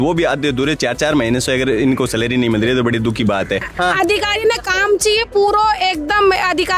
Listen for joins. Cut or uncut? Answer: cut